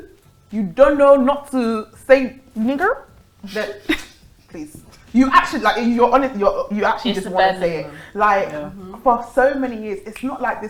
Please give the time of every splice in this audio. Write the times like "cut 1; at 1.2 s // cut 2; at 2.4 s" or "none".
none